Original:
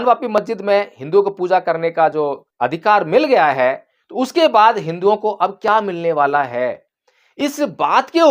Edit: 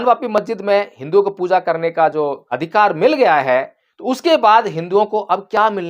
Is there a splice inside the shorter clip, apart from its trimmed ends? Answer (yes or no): yes